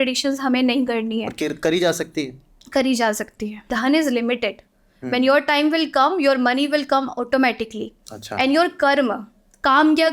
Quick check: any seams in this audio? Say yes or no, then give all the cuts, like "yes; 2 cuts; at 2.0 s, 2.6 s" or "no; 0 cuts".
yes; 1 cut; at 3.7 s